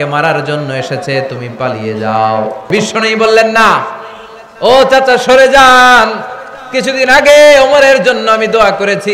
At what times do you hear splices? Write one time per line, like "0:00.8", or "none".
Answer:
0:02.7